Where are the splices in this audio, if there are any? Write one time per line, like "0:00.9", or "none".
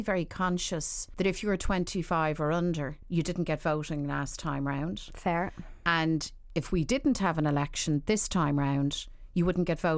0:01.0
0:03.0